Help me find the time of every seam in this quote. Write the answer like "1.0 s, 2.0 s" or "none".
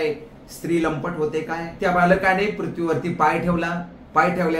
1.6 s